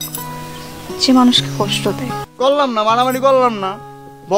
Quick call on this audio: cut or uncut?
cut